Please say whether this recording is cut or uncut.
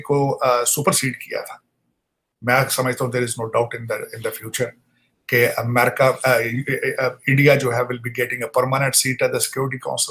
uncut